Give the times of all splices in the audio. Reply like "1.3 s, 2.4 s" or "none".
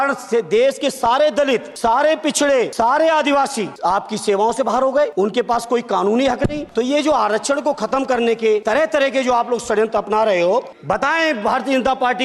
1.7 s, 2.7 s, 3.7 s, 5.1 s, 6.6 s, 8.6 s, 10.7 s